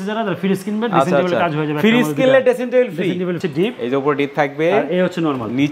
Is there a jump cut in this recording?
yes; 1 cut; at 3.4 s

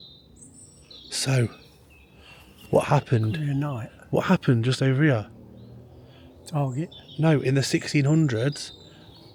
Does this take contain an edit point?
no; 0 cuts

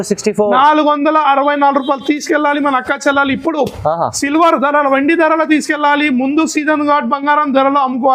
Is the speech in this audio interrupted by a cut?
no; 0 cuts

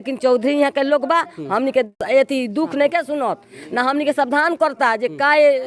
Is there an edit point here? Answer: yes; 1 cut; at 2.0 s

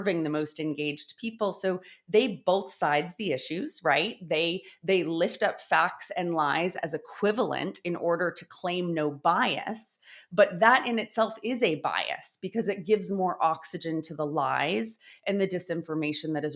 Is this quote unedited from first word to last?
yes; 0 cuts

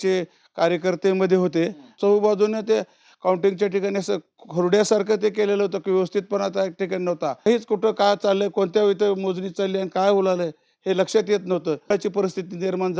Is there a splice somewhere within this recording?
yes; 3 cuts; at 1.9 s, 7.5 s, 11.9 s

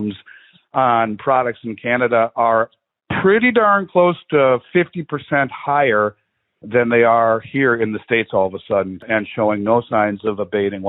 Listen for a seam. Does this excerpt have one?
yes; 1 cut; at 9.1 s

